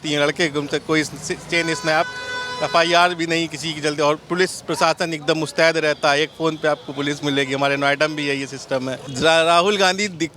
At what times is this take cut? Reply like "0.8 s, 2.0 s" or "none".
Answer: 9.1 s